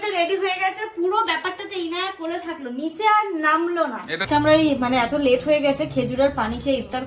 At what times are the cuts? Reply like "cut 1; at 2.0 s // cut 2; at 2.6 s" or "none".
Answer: cut 1; at 4.2 s